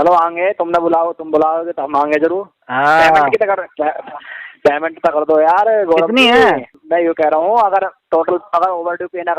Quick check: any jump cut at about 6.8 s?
yes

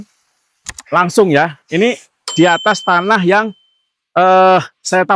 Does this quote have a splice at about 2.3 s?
yes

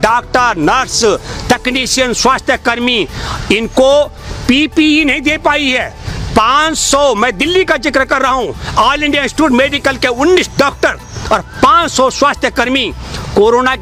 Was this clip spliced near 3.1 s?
no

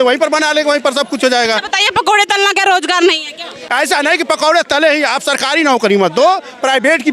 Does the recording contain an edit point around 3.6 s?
yes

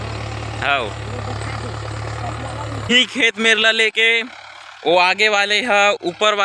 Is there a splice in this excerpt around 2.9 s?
yes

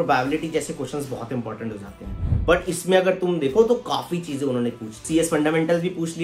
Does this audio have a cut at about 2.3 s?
yes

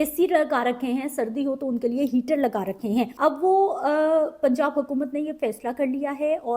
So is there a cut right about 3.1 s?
yes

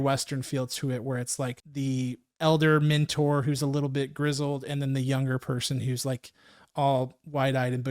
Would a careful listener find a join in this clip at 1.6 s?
yes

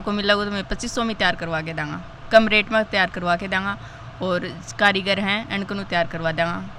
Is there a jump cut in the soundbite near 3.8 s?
no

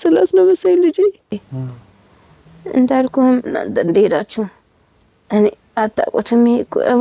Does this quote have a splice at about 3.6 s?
no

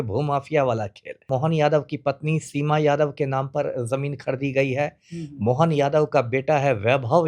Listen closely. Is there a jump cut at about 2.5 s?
no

